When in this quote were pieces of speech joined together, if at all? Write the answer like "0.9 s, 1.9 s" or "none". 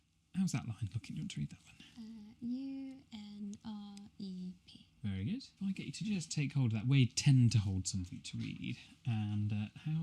5.5 s